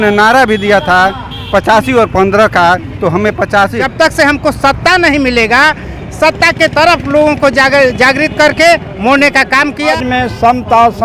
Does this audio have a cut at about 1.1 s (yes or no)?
no